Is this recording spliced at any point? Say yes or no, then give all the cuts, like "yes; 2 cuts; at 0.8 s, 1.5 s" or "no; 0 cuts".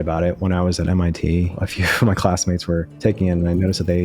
yes; 1 cut; at 1.6 s